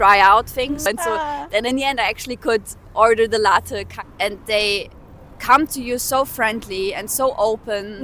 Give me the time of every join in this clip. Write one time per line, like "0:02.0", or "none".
0:00.9
0:03.9